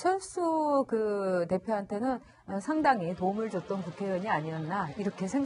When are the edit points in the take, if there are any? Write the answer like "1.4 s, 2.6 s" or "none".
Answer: none